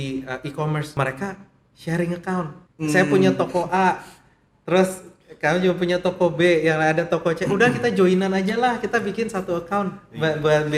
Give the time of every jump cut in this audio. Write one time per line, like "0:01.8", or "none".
0:00.9
0:02.6